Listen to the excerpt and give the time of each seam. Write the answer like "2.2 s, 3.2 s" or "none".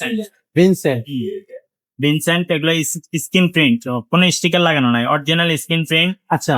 none